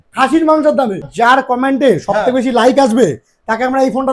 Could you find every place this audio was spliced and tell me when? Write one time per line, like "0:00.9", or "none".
0:01.1